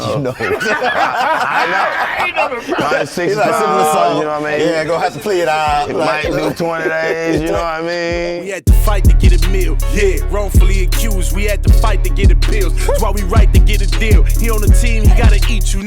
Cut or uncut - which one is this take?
cut